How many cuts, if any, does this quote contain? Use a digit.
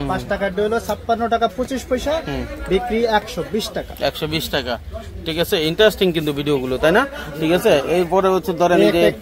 0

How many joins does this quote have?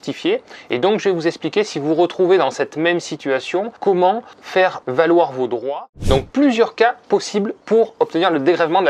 1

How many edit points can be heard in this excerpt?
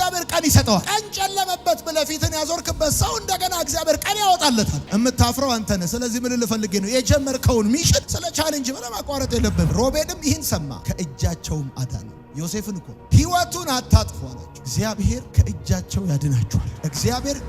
3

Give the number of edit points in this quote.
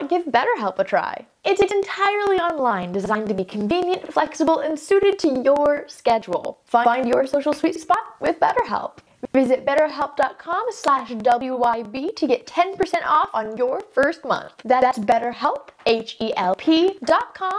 0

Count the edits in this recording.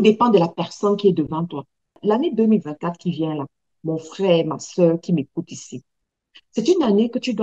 1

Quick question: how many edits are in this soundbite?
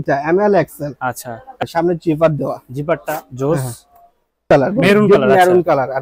2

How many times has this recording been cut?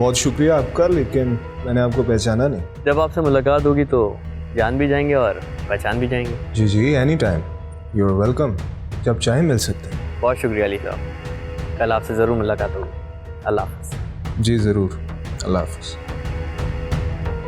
0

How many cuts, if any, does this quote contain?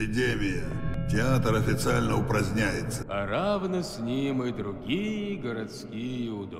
2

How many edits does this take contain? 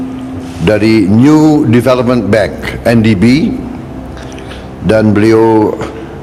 0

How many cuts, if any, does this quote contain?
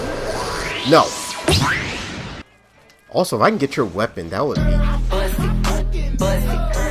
1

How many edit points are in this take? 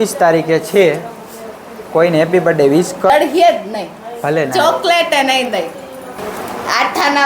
2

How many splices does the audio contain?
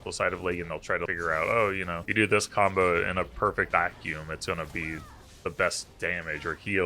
3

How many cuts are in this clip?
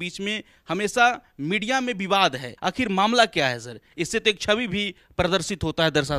1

